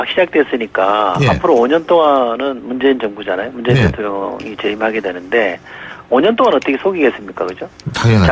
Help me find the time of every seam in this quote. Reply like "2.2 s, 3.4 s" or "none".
none